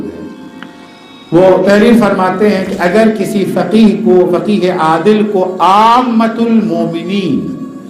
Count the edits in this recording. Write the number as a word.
zero